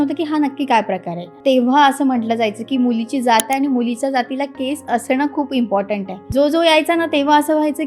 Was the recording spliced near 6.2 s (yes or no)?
yes